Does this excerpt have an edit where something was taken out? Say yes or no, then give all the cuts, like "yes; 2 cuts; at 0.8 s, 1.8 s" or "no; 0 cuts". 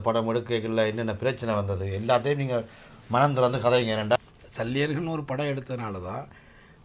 yes; 1 cut; at 4.2 s